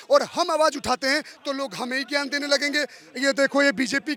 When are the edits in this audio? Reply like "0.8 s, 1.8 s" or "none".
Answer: none